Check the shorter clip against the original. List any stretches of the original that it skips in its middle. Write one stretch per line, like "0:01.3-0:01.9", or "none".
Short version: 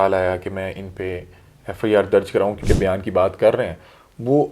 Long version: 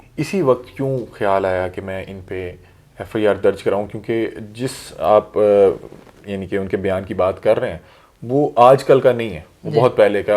0:03.9-0:06.7